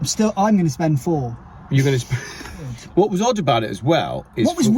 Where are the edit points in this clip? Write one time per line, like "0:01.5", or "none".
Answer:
0:02.7